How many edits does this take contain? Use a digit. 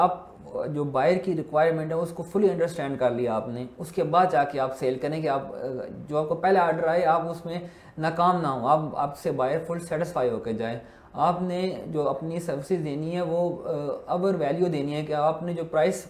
0